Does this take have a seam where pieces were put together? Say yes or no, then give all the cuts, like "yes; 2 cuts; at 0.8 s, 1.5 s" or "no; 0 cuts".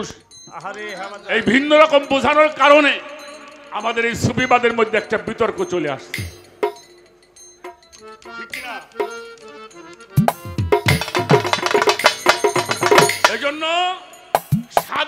no; 0 cuts